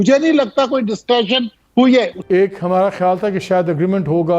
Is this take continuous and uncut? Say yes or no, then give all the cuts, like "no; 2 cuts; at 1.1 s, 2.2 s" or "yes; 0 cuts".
no; 1 cut; at 2.1 s